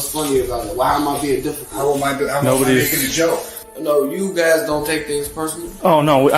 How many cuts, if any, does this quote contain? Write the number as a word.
one